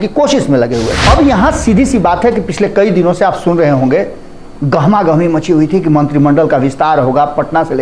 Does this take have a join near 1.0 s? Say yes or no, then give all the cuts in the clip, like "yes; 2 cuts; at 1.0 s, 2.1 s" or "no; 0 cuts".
yes; 1 cut; at 1.0 s